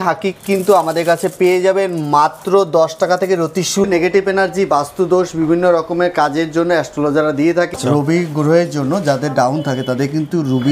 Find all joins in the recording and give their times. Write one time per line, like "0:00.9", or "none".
0:03.9
0:07.7

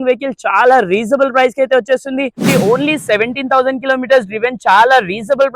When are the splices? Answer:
0:02.4

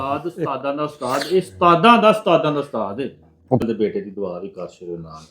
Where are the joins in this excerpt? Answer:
0:03.6

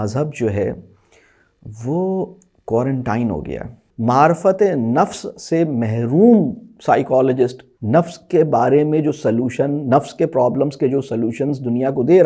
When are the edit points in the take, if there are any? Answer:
0:03.8
0:07.7

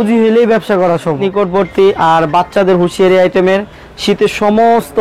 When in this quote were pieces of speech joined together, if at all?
0:01.2

